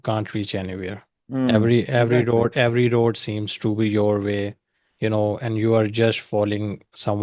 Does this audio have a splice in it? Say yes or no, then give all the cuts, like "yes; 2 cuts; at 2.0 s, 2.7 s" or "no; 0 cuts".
yes; 1 cut; at 1.1 s